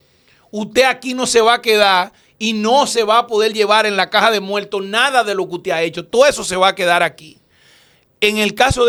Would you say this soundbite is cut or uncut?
uncut